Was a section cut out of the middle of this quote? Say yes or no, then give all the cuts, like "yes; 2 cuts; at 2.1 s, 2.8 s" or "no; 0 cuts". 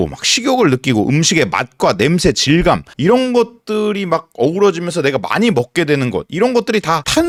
no; 0 cuts